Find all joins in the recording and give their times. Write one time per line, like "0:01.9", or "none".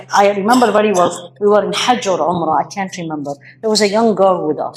none